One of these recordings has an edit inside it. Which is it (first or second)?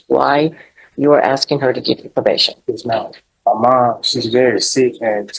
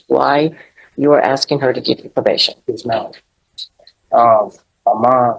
first